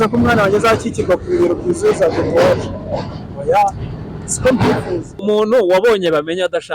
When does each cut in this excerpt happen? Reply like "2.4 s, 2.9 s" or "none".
5.1 s